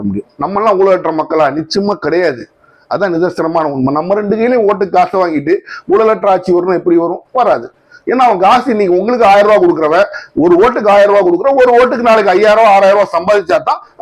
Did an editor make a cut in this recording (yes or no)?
no